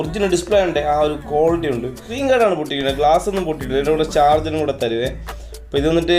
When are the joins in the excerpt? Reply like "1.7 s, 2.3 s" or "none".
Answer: 2.1 s